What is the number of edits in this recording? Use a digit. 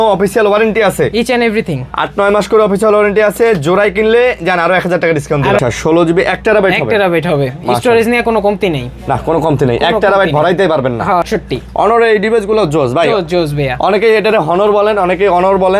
2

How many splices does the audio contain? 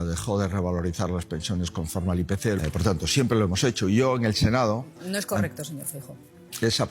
1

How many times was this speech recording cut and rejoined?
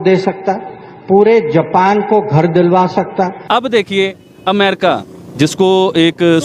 1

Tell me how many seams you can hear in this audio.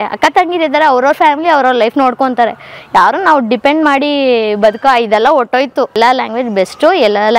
1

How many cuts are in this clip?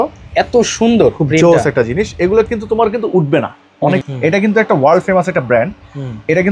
1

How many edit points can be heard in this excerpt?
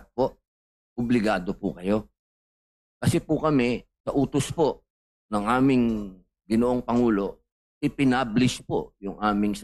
1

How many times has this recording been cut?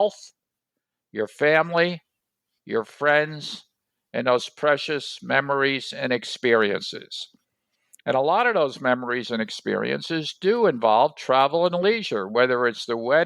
0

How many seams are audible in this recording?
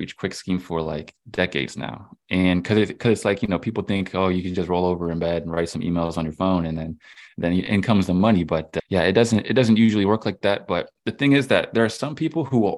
0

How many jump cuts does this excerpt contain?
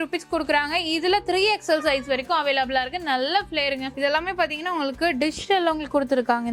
1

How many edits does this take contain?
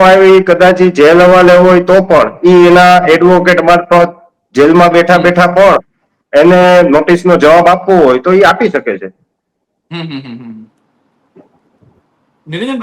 0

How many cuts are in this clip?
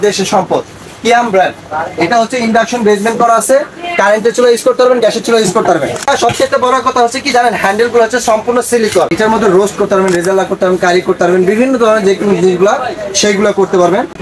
2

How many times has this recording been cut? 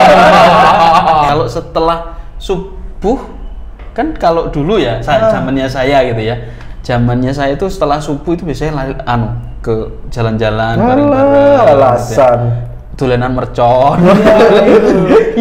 1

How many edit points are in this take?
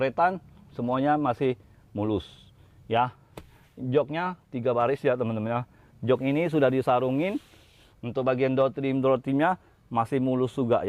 0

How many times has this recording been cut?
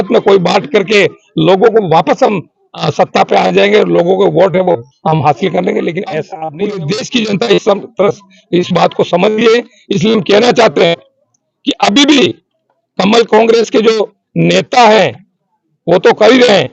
1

